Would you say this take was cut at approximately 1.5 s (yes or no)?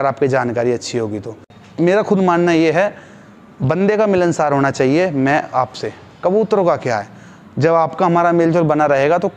yes